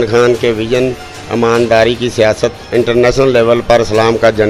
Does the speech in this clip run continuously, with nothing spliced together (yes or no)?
yes